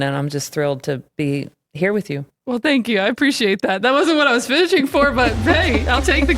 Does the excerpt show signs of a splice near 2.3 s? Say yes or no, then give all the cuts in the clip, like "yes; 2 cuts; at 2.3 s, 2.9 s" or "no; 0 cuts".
yes; 1 cut; at 2.3 s